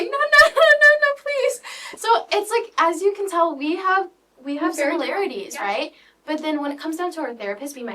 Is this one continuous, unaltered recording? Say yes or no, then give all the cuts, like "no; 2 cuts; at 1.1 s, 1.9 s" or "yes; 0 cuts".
yes; 0 cuts